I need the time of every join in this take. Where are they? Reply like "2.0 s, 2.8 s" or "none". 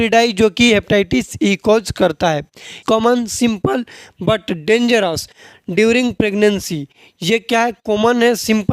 2.8 s